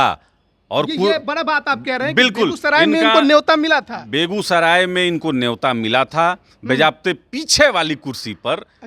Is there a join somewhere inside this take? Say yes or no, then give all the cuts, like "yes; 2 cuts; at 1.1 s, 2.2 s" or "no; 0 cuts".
no; 0 cuts